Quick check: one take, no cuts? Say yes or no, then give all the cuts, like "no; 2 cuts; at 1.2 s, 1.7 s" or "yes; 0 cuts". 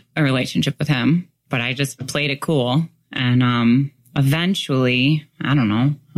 yes; 0 cuts